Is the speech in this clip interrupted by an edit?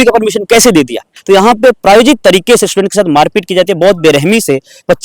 yes; 1 cut; at 1.1 s

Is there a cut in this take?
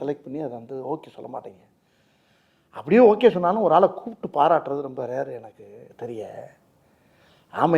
no; 0 cuts

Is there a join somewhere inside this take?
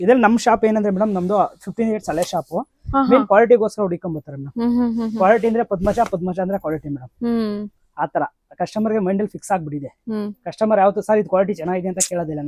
no; 0 cuts

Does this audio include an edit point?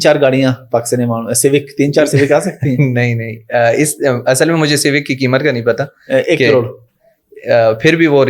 no; 0 cuts

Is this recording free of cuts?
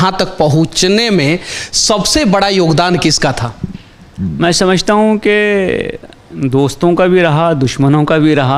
yes; 0 cuts

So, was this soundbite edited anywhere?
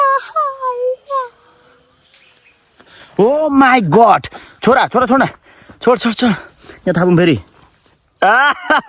no; 0 cuts

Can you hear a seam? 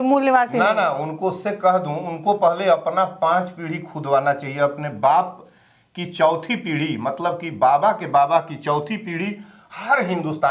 no; 0 cuts

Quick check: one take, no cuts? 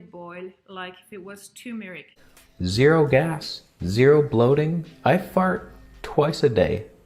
no; 1 cut; at 2.1 s

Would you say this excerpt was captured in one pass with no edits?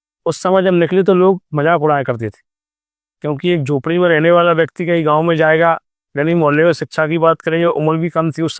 yes; 0 cuts

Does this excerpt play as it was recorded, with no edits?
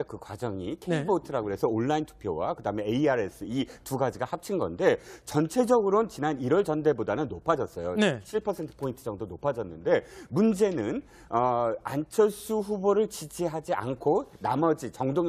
no; 1 cut; at 5.4 s

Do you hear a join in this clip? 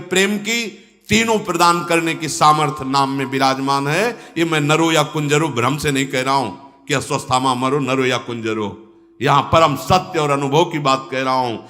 no; 0 cuts

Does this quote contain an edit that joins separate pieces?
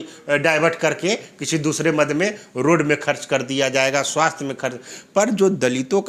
no; 0 cuts

